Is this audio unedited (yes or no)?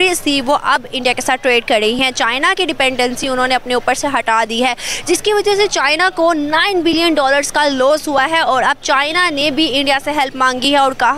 yes